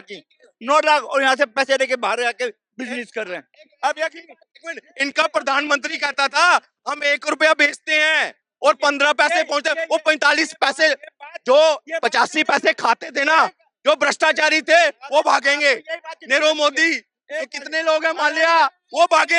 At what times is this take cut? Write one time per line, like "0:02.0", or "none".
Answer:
0:04.9